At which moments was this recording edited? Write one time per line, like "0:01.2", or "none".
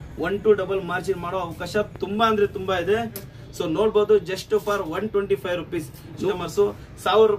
0:03.4
0:06.3